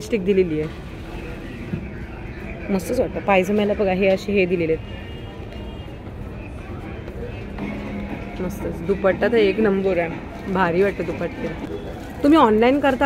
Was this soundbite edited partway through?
yes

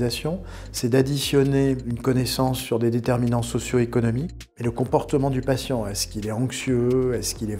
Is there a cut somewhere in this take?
yes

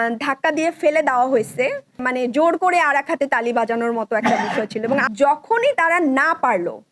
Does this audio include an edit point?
yes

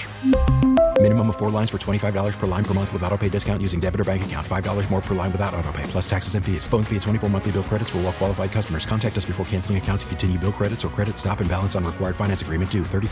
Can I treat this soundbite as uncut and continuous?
yes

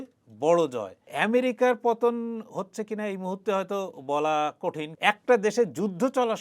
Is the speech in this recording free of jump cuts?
no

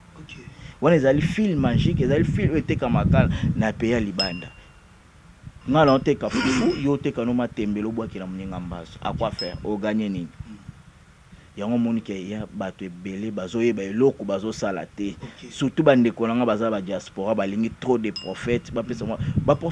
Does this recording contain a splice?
yes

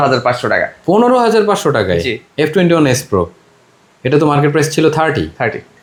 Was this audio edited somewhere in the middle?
no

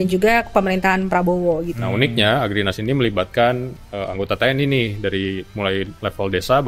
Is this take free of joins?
no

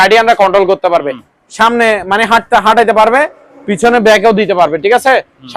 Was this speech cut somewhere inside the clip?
no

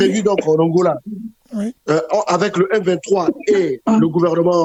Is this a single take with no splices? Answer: yes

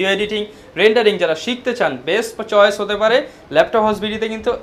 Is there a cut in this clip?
no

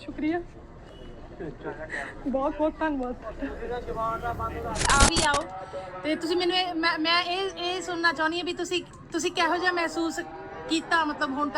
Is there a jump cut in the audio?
yes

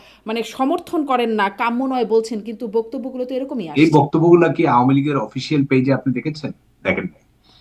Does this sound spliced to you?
yes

